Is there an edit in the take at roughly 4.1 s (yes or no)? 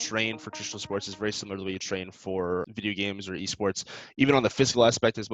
no